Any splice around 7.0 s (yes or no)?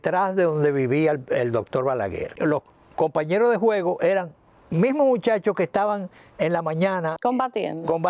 no